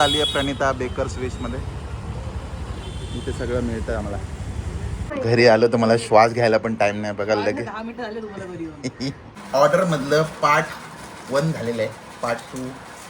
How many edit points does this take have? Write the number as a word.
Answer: two